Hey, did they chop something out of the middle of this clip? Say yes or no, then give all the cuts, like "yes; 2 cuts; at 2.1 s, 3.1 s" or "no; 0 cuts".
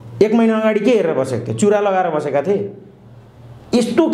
no; 0 cuts